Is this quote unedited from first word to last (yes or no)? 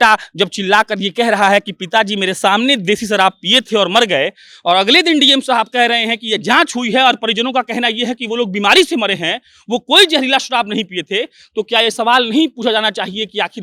yes